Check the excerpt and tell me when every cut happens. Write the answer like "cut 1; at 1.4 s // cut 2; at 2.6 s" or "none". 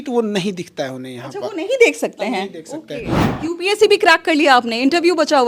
cut 1; at 3.3 s